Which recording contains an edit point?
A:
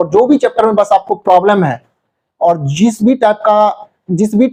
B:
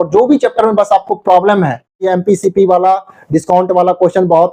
B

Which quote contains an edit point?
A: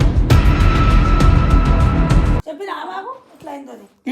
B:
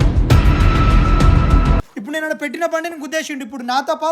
B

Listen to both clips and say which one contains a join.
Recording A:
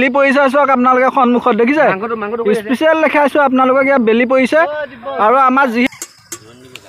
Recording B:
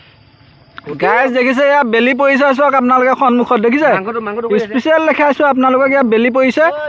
A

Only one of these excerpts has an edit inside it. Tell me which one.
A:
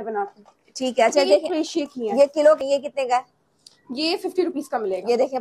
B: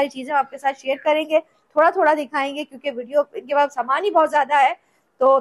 A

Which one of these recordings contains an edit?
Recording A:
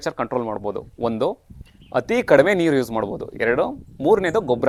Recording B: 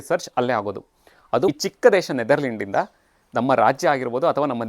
B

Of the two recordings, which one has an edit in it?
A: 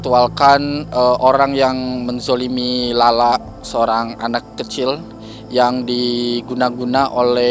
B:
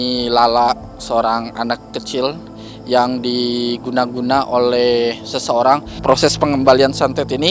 B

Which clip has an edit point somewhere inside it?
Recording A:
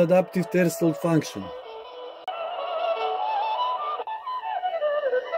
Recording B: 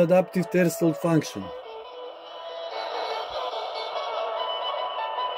A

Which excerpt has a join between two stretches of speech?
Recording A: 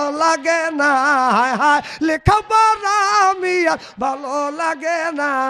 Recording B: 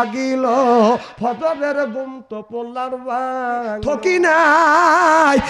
B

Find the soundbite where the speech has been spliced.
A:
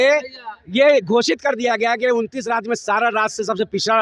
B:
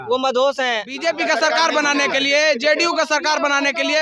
B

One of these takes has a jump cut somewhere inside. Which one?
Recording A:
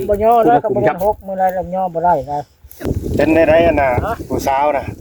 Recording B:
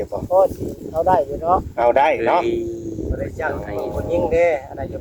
A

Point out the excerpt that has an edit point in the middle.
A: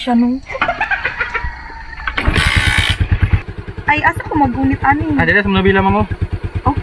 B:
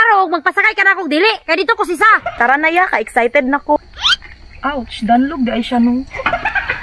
B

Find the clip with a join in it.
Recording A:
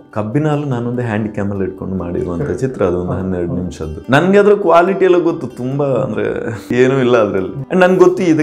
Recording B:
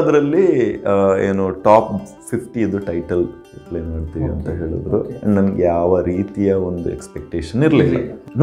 A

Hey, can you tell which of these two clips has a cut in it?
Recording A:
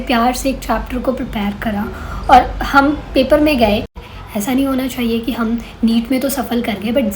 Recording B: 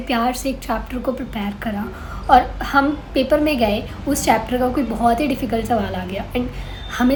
A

